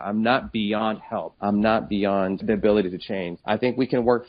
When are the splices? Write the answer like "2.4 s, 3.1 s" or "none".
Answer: 1.3 s, 2.4 s, 3.3 s